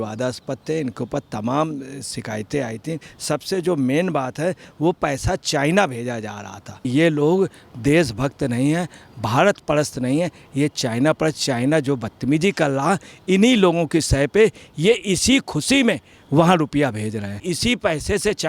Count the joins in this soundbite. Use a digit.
3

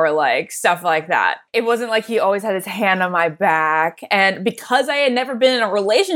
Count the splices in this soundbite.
1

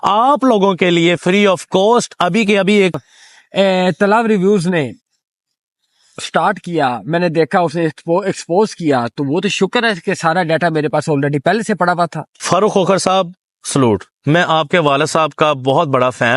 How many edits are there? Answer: 2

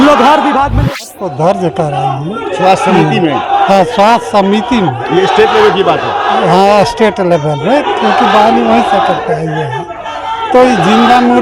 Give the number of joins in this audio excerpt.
1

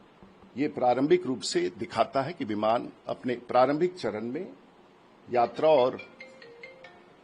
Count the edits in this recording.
0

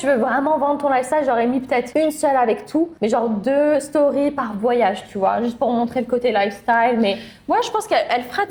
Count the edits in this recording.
0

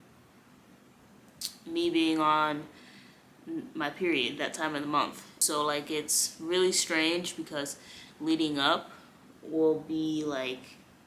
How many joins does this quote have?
1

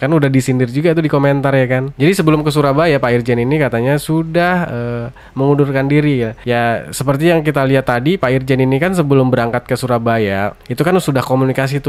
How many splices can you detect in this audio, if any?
1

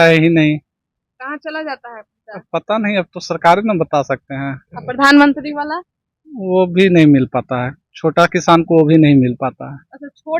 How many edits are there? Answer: 0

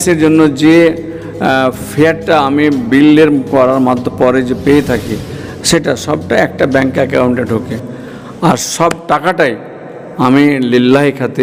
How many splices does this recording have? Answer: 0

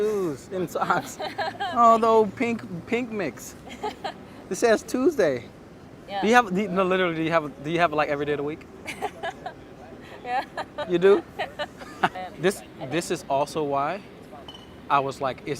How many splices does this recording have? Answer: 2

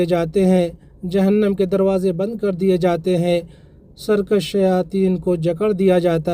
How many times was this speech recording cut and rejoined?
0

